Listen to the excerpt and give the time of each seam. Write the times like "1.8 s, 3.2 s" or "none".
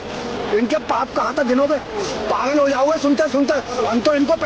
none